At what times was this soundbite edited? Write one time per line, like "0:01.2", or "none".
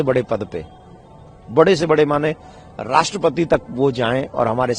none